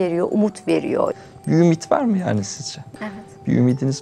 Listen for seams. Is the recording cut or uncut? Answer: cut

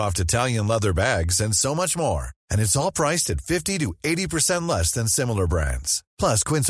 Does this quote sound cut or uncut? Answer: uncut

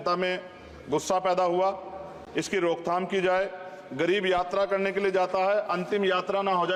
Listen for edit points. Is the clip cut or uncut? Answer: uncut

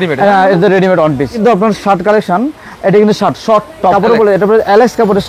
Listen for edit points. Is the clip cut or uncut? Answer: cut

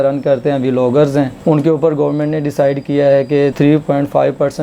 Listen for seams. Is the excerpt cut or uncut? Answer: uncut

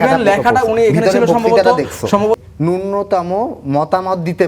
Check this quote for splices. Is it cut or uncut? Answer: cut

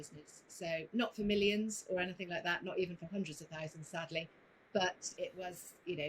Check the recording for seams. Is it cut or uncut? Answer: cut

